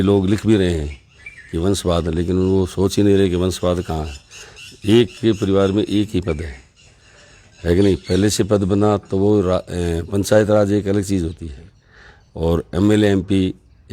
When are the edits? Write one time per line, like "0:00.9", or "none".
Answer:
none

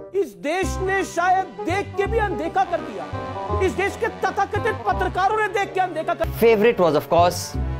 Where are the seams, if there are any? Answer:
0:06.3

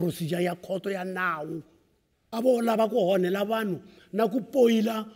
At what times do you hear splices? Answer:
none

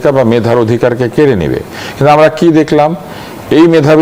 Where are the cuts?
none

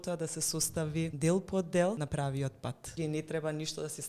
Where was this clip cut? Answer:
0:01.1
0:02.5

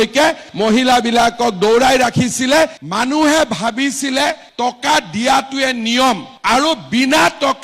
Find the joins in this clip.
0:02.8

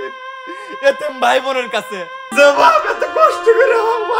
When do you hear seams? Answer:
0:02.2

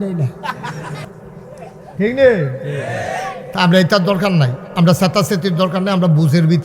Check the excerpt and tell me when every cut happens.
0:01.1

